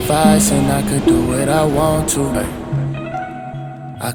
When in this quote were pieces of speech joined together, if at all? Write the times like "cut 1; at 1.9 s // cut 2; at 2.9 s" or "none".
none